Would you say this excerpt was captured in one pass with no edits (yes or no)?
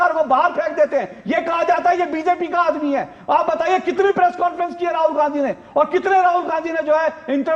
yes